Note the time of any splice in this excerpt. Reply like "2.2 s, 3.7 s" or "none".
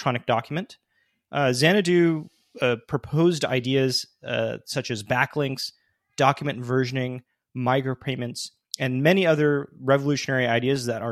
none